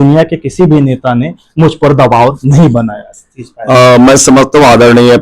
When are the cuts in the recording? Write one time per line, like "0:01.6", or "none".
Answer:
none